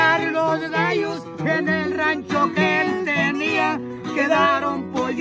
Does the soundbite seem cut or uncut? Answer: uncut